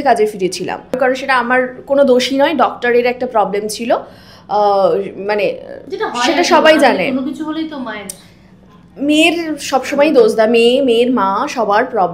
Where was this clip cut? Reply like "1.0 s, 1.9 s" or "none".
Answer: none